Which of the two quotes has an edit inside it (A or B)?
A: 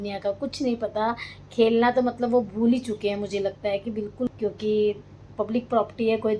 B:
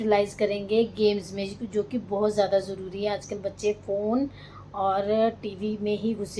A